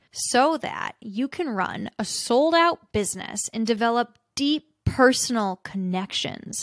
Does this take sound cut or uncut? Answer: uncut